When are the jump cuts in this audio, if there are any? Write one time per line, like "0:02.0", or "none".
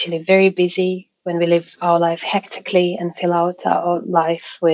none